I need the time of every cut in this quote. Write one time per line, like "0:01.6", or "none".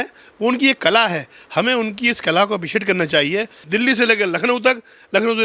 0:03.6